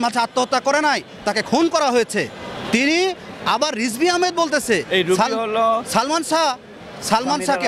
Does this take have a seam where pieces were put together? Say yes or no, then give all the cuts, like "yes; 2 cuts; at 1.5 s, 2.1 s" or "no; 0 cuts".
no; 0 cuts